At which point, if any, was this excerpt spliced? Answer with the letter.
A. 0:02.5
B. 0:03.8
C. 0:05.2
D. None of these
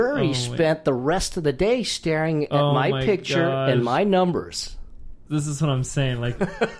C